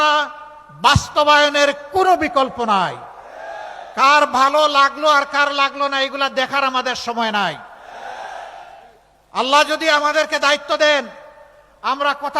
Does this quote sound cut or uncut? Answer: cut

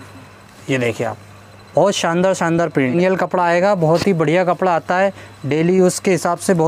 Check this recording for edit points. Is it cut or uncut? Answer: cut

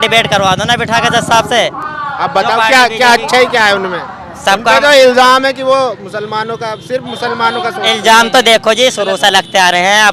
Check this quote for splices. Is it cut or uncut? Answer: uncut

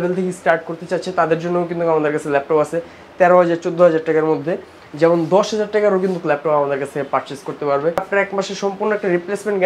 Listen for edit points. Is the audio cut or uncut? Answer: cut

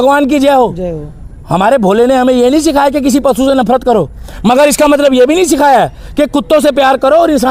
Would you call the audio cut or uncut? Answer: uncut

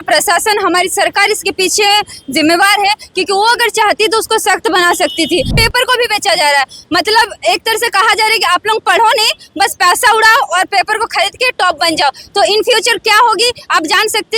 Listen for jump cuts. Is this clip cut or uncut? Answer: cut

